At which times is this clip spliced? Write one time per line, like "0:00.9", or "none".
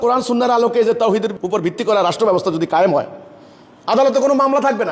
0:01.4